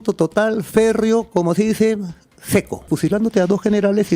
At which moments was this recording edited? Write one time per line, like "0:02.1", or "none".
0:02.9